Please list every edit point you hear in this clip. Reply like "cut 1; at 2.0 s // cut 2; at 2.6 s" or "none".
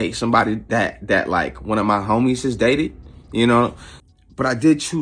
cut 1; at 3.9 s